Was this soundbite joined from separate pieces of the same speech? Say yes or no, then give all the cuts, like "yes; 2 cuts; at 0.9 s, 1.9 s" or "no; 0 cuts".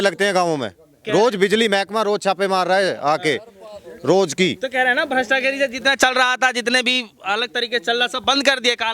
no; 0 cuts